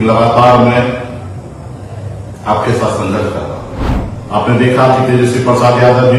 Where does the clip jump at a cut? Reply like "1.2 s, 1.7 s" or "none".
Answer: 4.0 s